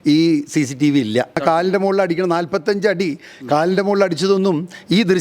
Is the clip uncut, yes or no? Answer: no